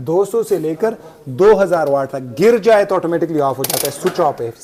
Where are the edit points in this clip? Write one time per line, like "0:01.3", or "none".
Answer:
none